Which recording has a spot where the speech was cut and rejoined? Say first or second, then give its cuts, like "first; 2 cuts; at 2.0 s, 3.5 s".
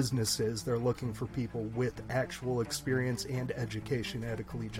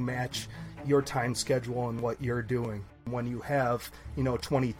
second; 1 cut; at 3.1 s